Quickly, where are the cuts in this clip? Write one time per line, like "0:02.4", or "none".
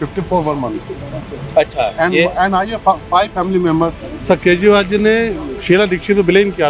0:04.1